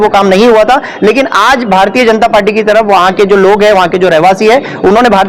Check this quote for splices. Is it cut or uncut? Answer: uncut